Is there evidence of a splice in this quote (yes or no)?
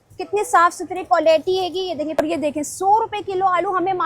yes